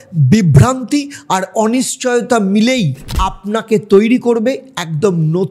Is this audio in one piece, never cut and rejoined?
yes; 0 cuts

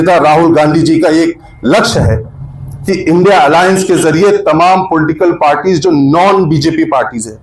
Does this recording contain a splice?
no; 0 cuts

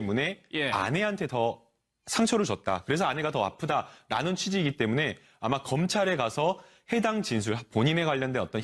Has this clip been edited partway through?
yes; 1 cut; at 5.1 s

